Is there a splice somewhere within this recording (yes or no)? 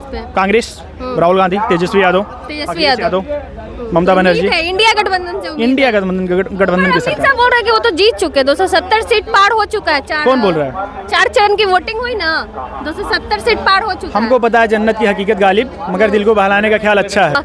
no